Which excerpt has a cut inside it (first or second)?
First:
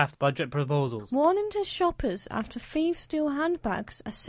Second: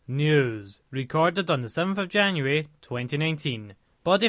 first